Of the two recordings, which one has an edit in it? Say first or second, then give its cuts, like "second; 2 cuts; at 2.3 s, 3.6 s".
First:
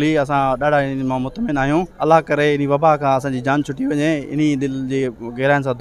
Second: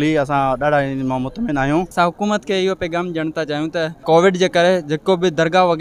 second; 2 cuts; at 1.9 s, 4.0 s